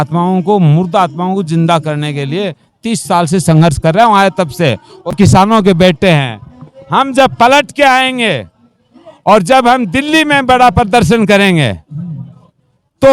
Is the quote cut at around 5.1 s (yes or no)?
yes